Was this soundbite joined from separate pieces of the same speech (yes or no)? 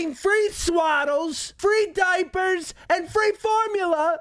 yes